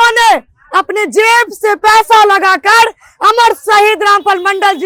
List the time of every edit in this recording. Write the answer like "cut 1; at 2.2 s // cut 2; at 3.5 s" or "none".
none